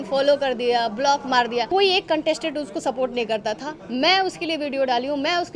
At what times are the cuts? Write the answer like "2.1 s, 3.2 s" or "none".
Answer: 1.7 s